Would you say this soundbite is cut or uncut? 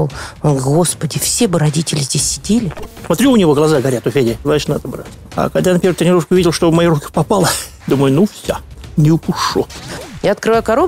cut